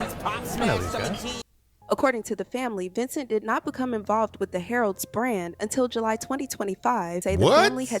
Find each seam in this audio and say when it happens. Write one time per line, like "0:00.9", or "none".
0:01.7
0:07.2